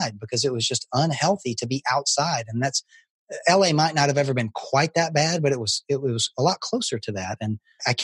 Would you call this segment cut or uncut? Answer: uncut